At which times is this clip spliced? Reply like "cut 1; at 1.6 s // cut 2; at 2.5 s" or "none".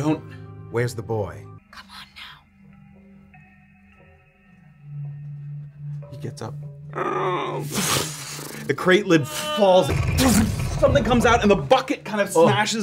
cut 1; at 1.6 s // cut 2; at 9.9 s